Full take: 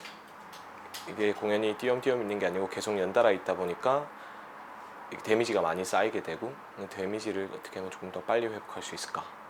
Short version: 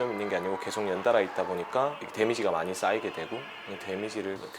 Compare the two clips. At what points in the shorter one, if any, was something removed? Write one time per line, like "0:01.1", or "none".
0:02.0